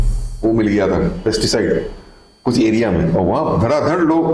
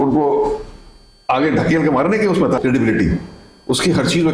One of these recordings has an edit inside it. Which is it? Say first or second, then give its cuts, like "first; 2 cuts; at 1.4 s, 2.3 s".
second; 1 cut; at 2.6 s